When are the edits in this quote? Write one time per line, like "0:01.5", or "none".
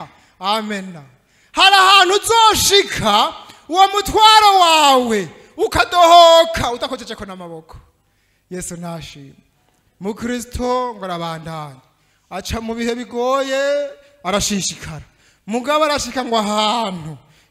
none